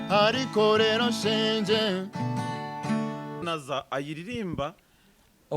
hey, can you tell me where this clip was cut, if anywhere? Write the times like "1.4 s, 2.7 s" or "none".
3.4 s